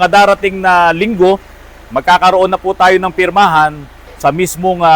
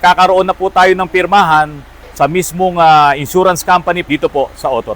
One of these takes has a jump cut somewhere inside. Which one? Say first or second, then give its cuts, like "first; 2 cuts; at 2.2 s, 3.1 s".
second; 1 cut; at 4.0 s